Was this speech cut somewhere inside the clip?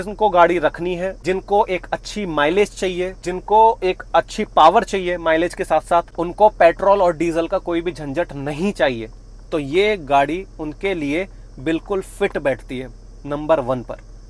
yes; 3 cuts; at 1.2 s, 3.2 s, 6.1 s

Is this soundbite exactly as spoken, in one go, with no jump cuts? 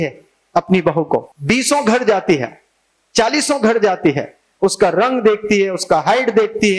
no; 1 cut; at 1.3 s

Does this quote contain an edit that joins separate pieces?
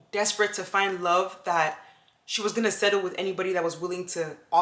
no; 0 cuts

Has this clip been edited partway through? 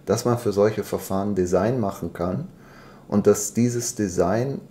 no; 0 cuts

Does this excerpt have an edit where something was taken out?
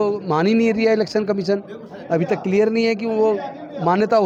no; 0 cuts

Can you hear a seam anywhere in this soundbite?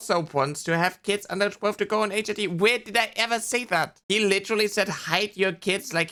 no; 0 cuts

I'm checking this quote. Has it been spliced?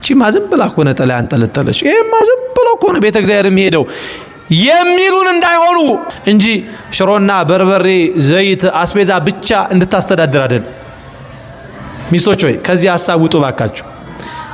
yes; 1 cut; at 6.1 s

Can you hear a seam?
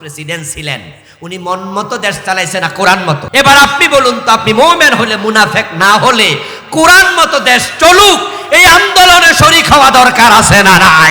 yes; 1 cut; at 3.2 s

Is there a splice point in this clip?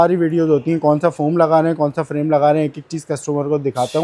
no; 0 cuts

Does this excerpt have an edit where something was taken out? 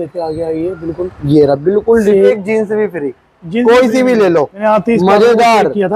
yes; 2 cuts; at 2.3 s, 4.6 s

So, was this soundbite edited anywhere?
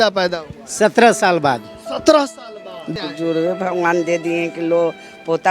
yes; 1 cut; at 2.8 s

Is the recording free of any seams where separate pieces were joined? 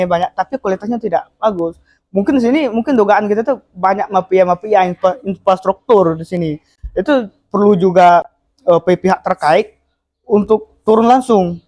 yes; 0 cuts

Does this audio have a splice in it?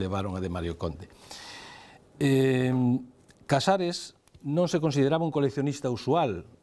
yes; 1 cut; at 3.4 s

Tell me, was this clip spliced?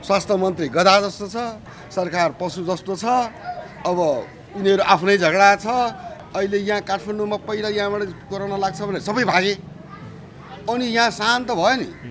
yes; 2 cuts; at 1.8 s, 6.1 s

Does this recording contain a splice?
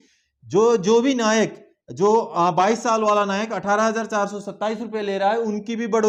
no; 0 cuts

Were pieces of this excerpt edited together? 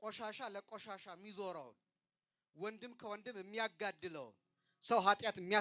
no; 0 cuts

